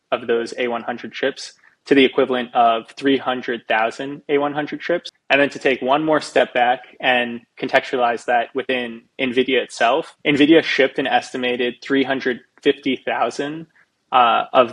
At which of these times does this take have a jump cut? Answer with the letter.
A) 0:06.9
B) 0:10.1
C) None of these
B